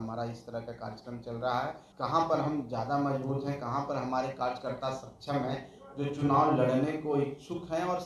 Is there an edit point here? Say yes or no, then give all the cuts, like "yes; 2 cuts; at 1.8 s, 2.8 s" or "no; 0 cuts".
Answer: yes; 1 cut; at 1.8 s